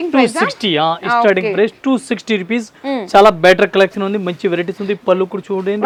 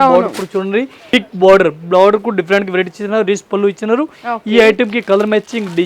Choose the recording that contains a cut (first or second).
second